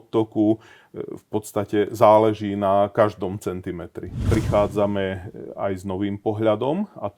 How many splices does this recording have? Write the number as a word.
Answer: one